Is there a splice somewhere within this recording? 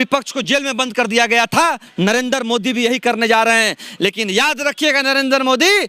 no; 0 cuts

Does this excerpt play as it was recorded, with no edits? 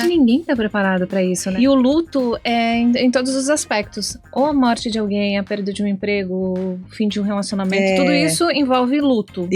no; 1 cut; at 1.5 s

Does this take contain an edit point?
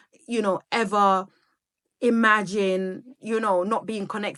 no; 0 cuts

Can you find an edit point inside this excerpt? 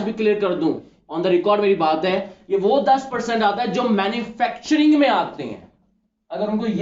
no; 0 cuts

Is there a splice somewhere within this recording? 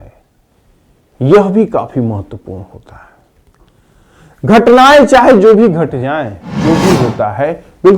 yes; 1 cut; at 6.4 s

